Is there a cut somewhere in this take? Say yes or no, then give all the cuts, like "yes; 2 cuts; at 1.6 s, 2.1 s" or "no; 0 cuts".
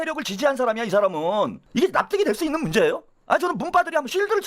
yes; 1 cut; at 1.6 s